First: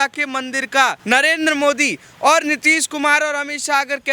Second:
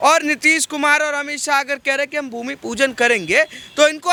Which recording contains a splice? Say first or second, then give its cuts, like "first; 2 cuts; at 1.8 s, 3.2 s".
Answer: first; 1 cut; at 1.0 s